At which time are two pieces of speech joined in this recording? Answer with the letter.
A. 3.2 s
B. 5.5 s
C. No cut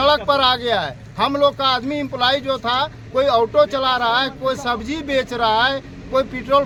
C